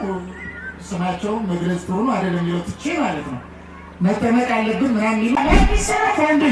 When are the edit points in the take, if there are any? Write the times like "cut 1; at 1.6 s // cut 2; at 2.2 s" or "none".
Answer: cut 1; at 5.4 s